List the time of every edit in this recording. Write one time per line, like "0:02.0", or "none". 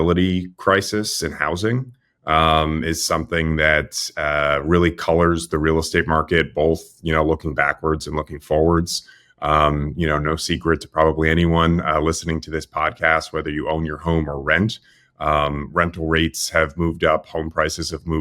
none